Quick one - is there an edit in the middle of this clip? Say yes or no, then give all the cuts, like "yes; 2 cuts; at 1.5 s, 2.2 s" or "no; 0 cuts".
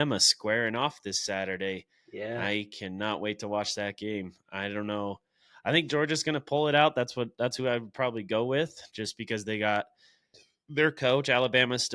no; 0 cuts